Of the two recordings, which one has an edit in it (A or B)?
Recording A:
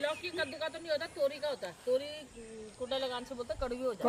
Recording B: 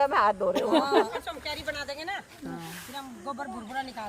B